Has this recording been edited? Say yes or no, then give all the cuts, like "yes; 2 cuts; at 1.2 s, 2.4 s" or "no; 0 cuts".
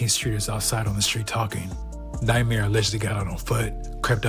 no; 0 cuts